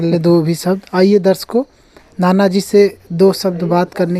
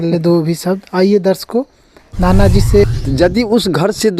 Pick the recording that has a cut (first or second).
second